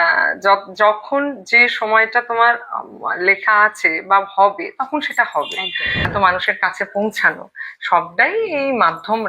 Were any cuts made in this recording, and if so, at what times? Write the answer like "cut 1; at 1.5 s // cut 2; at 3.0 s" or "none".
cut 1; at 6.1 s